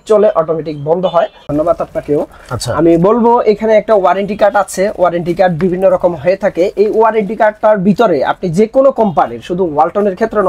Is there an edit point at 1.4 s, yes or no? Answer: yes